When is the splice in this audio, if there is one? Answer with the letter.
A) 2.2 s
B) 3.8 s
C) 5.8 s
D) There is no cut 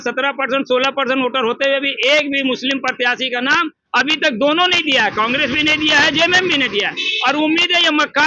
D